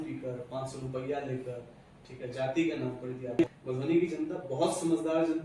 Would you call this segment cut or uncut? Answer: cut